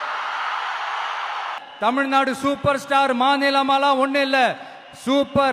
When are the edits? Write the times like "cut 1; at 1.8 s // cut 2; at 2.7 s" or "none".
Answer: cut 1; at 1.6 s